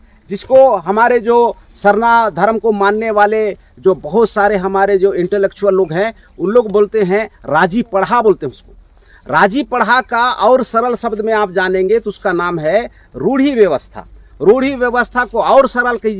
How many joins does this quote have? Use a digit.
0